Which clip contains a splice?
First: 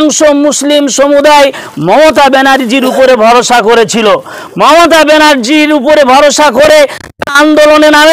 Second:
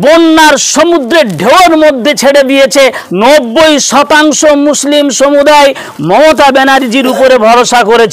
second; 1 cut; at 3.0 s

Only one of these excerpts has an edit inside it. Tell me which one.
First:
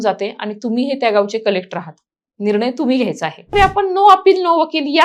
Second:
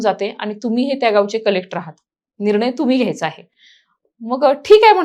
first; 1 cut; at 3.5 s

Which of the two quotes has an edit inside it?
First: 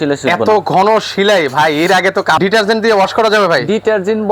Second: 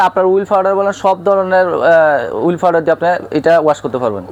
first; 1 cut; at 2.4 s

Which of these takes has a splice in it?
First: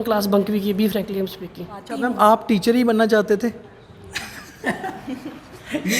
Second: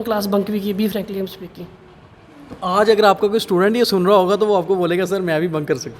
first; 1 cut; at 1.9 s

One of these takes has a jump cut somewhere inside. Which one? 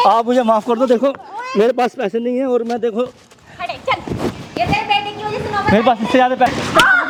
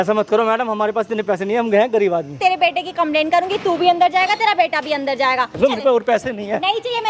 second; 2 cuts; at 2.3 s, 5.6 s

